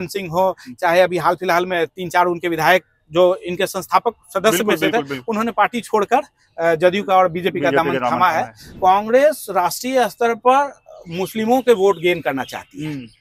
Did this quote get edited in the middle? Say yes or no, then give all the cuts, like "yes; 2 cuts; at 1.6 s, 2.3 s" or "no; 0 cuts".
yes; 1 cut; at 8.6 s